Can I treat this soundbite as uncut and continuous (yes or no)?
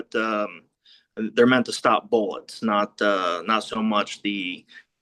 yes